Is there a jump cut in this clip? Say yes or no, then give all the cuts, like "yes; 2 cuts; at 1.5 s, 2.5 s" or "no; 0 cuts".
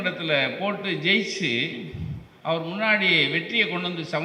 no; 0 cuts